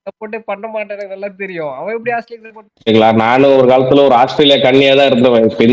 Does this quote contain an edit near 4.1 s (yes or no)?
no